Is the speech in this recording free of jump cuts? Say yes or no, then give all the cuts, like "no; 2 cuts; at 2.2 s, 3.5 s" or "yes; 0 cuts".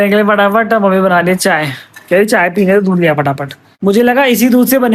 yes; 0 cuts